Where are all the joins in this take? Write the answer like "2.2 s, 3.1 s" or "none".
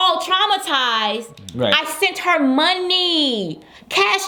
none

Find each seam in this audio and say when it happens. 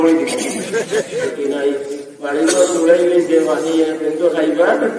1.3 s

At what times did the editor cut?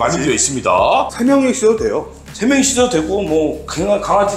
1.1 s

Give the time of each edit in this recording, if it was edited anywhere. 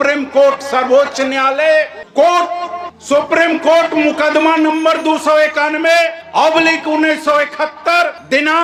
none

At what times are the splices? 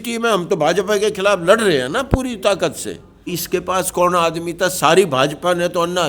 3.4 s

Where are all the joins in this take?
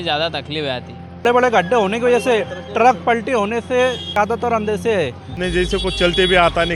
1.2 s, 4.2 s, 5.3 s

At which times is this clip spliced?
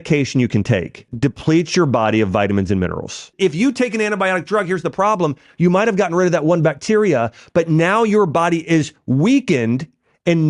1.1 s, 3.3 s

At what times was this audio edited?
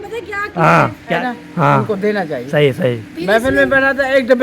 1.2 s

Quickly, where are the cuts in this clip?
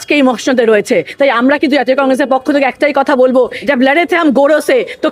3.6 s

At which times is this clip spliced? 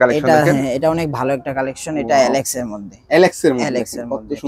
none

